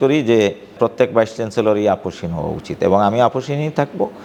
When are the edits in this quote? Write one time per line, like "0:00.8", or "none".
none